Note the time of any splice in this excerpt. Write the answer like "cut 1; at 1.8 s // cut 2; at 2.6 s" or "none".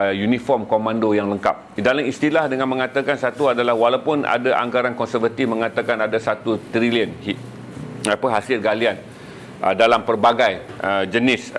cut 1; at 1.7 s